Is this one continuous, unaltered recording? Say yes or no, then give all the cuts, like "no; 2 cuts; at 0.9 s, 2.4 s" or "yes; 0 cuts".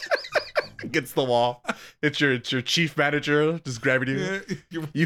yes; 0 cuts